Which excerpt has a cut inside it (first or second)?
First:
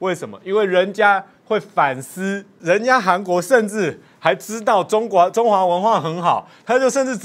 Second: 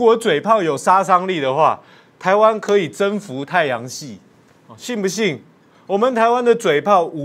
first